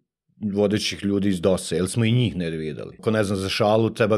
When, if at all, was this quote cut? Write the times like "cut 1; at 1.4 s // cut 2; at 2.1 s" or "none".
cut 1; at 2.9 s